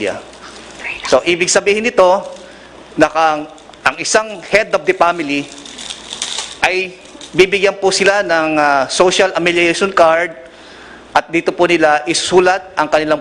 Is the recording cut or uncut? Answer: uncut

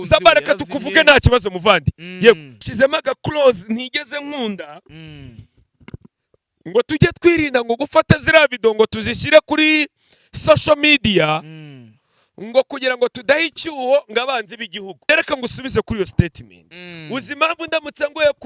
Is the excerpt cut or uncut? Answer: cut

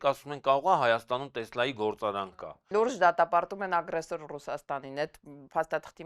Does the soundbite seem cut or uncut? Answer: cut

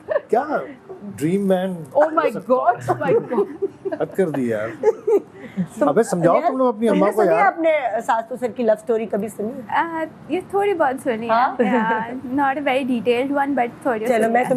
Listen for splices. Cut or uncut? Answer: uncut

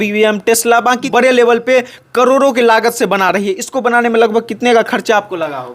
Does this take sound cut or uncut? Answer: cut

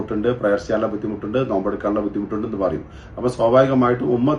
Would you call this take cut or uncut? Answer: uncut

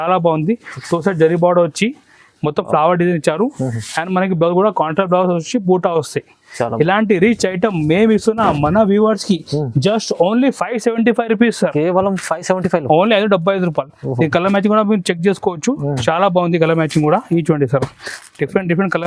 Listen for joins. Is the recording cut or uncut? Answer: uncut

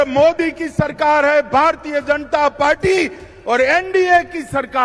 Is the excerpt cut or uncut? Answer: uncut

